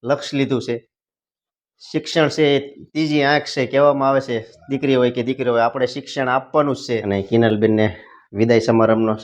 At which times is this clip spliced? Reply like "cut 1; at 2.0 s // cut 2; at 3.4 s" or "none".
cut 1; at 7.0 s